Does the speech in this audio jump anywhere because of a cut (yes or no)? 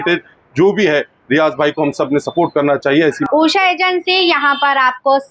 yes